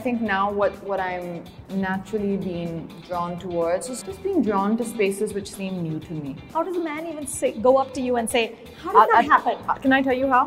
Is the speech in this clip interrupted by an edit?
yes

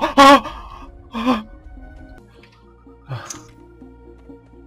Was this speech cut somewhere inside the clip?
yes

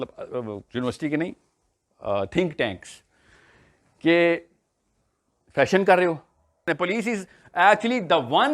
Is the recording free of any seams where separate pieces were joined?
no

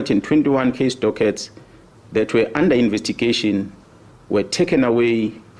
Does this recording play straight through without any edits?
yes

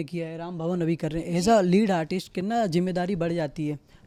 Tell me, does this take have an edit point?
no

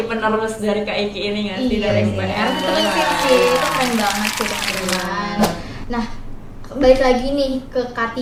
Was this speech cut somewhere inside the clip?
no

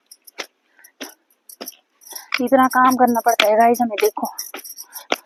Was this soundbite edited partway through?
no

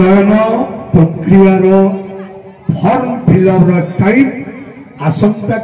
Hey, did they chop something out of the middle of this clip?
no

